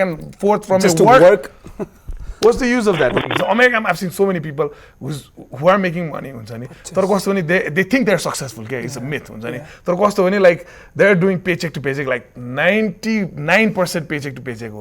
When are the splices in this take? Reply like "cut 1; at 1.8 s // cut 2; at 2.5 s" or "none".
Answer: cut 1; at 3.2 s